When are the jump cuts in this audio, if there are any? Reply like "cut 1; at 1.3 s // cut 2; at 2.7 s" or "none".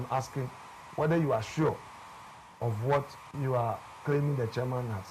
cut 1; at 3.2 s